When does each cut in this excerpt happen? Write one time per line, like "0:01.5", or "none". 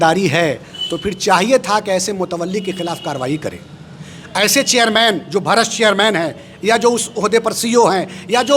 none